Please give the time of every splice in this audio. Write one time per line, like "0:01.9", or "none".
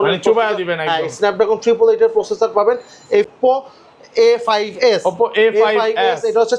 0:03.3